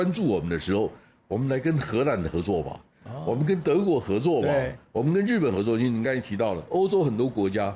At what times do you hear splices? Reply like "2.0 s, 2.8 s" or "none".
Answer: none